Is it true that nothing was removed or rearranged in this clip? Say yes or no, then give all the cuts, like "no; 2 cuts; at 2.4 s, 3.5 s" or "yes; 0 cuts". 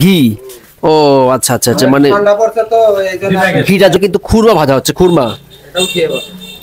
no; 1 cut; at 4.0 s